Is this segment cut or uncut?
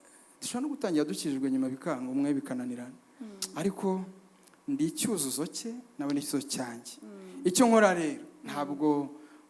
uncut